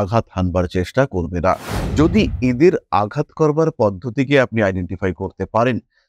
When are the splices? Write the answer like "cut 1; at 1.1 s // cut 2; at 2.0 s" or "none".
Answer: cut 1; at 1.7 s